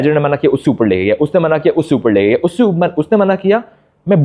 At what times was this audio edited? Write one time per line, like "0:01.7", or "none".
none

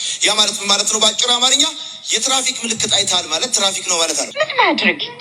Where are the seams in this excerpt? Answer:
0:04.3

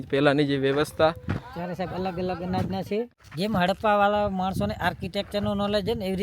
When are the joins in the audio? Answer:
0:03.2

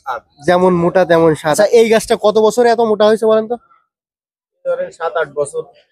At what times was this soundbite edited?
0:01.6

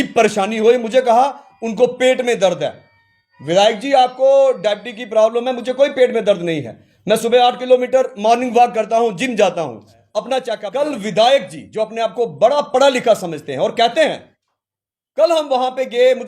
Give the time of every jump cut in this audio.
0:10.7

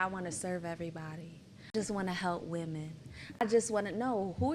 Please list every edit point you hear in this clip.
0:01.7
0:03.4

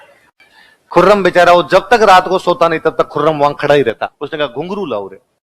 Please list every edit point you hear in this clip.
0:04.1

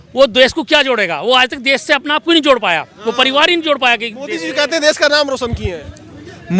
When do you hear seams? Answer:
none

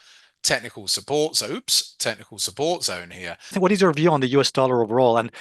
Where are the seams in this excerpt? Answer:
0:03.5

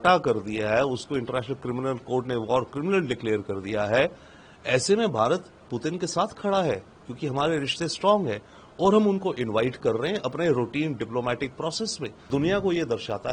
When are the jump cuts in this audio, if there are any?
0:12.3

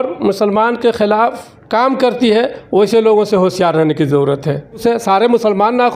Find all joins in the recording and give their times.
0:04.8

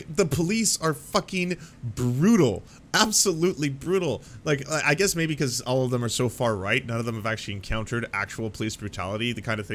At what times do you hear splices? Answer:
none

